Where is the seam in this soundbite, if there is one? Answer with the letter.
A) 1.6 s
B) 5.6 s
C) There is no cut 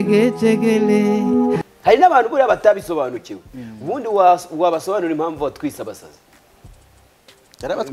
A